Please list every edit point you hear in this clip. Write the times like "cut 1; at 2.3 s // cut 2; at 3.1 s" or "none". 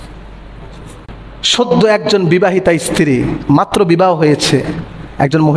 cut 1; at 1.0 s